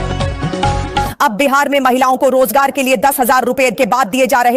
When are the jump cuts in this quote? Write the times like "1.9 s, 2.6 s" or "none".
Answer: none